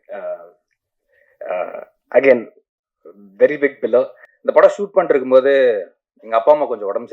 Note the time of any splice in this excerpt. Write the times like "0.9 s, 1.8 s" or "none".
4.2 s